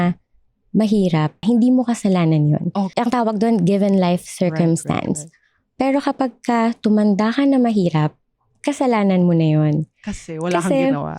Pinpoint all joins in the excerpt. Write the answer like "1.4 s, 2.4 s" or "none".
1.4 s, 2.9 s